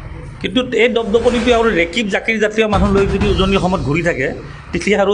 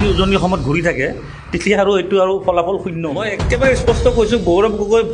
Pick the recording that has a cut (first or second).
second